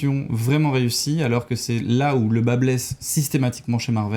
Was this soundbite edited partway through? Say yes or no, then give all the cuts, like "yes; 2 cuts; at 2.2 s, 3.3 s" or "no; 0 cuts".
no; 0 cuts